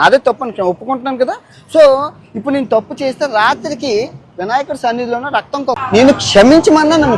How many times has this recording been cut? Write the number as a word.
one